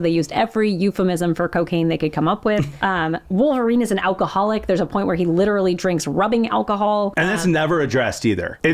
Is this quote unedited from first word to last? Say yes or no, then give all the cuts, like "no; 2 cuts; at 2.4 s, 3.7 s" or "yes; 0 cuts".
yes; 0 cuts